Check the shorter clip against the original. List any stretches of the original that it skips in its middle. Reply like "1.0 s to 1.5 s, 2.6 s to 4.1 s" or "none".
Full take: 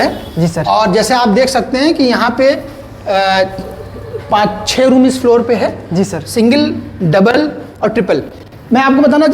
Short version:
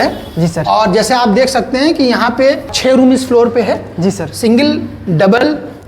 2.7 s to 4.6 s